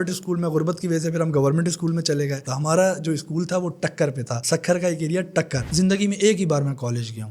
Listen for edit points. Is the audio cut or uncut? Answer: cut